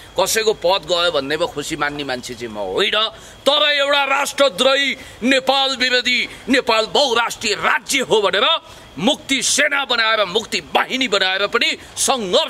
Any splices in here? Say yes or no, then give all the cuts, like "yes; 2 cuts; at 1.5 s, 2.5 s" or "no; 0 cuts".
no; 0 cuts